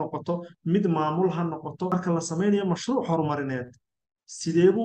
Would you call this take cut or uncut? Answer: cut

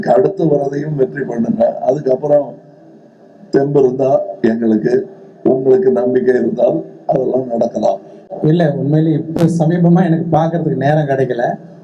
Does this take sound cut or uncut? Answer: cut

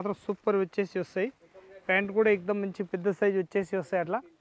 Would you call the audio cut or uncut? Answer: uncut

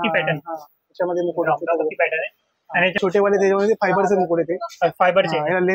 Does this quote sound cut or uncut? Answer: cut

